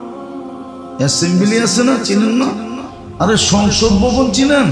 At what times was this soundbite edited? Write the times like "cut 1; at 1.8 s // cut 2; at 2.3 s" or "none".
cut 1; at 0.9 s